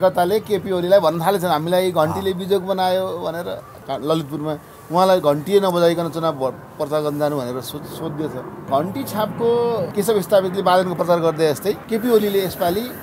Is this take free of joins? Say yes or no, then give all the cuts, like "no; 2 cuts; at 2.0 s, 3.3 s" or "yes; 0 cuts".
no; 4 cuts; at 3.7 s, 8.6 s, 9.9 s, 11.8 s